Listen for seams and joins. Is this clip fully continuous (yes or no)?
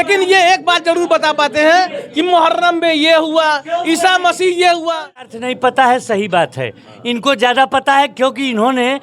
no